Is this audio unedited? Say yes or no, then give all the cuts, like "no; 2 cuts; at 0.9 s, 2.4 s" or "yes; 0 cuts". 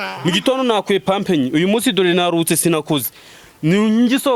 yes; 0 cuts